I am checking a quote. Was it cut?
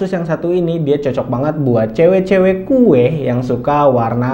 no; 0 cuts

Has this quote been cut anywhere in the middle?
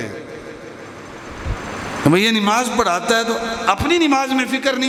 no; 0 cuts

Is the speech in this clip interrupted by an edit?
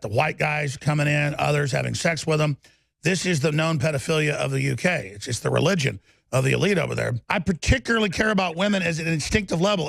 yes; 1 cut; at 7.2 s

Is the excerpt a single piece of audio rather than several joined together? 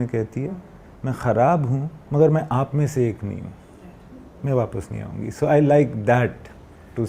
yes; 0 cuts

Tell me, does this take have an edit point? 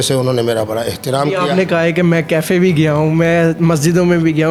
no; 0 cuts

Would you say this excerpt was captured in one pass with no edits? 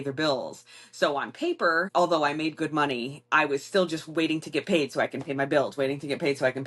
yes; 0 cuts

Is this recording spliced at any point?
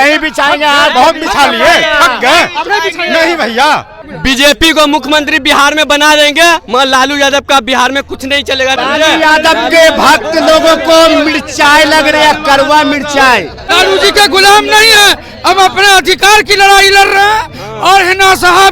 yes; 3 cuts; at 4.1 s, 8.8 s, 13.6 s

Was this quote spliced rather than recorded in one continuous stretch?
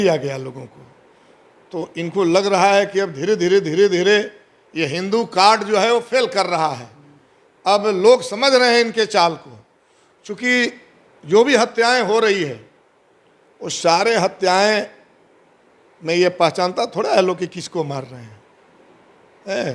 no; 0 cuts

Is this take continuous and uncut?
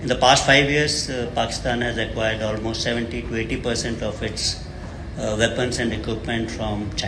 yes; 0 cuts

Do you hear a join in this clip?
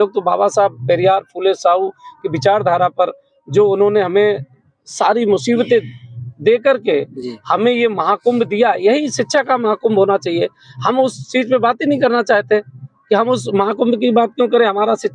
no; 0 cuts

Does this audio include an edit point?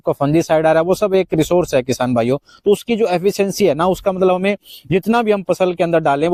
no; 0 cuts

